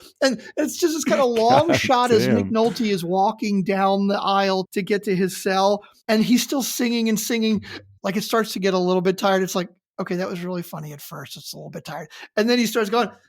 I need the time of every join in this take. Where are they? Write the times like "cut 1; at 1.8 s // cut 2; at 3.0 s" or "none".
cut 1; at 4.7 s // cut 2; at 5.9 s // cut 3; at 7.8 s